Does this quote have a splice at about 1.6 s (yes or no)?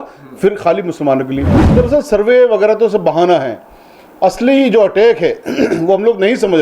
yes